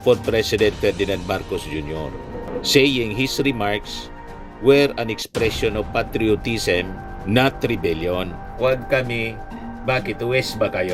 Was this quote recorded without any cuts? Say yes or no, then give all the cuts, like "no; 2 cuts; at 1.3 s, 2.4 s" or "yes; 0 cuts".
yes; 0 cuts